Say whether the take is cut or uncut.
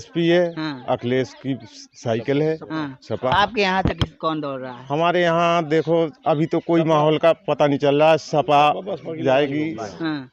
uncut